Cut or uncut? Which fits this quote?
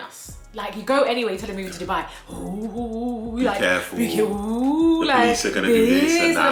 uncut